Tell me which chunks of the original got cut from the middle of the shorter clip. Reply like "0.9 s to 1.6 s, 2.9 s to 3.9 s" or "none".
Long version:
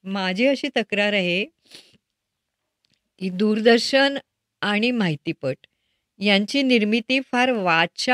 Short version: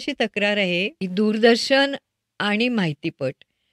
1.5 s to 3.2 s